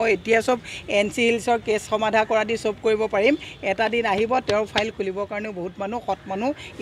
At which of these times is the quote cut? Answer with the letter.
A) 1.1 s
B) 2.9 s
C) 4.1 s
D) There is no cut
D